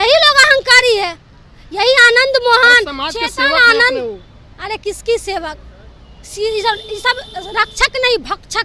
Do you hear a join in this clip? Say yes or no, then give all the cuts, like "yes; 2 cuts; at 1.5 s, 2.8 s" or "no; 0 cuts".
no; 0 cuts